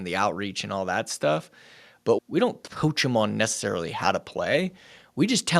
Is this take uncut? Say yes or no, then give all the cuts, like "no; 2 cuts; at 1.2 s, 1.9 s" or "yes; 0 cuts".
no; 1 cut; at 2.2 s